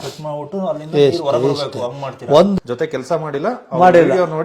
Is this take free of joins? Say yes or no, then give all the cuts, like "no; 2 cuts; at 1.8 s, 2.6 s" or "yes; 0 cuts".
no; 1 cut; at 2.6 s